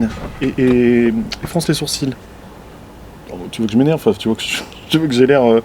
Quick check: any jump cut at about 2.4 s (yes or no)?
no